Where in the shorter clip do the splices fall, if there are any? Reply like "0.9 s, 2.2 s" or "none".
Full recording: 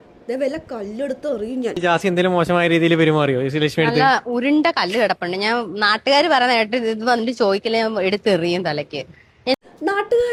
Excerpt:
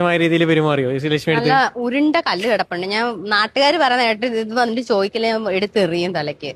none